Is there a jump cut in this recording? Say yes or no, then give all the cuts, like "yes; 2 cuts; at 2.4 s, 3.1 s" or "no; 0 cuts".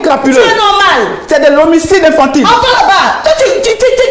no; 0 cuts